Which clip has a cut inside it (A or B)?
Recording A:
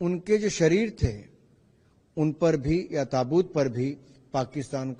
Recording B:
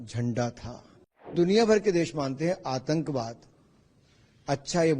B